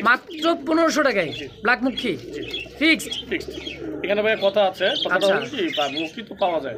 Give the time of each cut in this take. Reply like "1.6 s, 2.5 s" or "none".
none